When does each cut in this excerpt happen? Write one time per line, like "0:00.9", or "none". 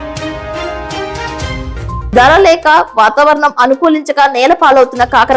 0:01.8